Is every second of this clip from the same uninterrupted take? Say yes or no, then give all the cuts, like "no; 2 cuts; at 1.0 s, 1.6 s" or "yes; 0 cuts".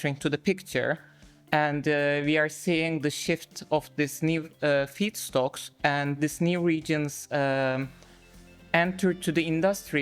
yes; 0 cuts